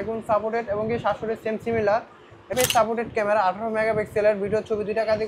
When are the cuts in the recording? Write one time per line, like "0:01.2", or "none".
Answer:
0:02.5